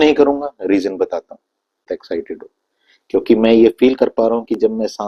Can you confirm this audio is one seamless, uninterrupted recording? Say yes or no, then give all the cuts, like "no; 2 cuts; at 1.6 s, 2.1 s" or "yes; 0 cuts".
no; 1 cut; at 1.9 s